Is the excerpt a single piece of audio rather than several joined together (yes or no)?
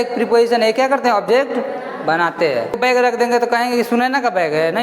no